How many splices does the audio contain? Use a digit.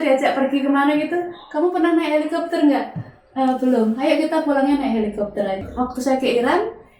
1